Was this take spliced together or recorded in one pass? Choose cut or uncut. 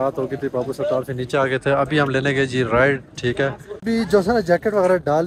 cut